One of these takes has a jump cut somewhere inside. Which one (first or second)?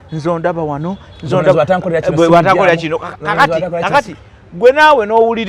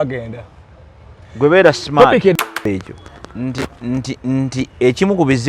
second